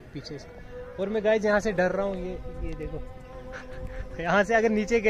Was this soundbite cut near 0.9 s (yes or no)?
no